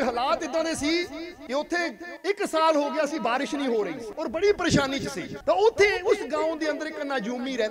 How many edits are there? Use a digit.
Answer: 4